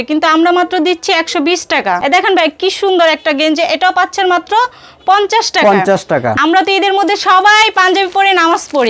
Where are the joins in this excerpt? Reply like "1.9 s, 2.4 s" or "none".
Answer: 2.0 s, 6.4 s